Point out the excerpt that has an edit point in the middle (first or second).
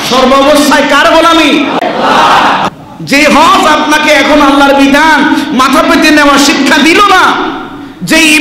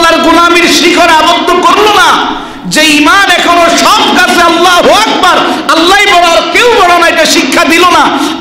first